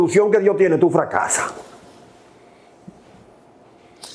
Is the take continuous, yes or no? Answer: yes